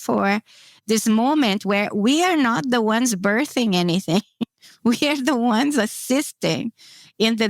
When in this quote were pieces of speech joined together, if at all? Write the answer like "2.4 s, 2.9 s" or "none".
none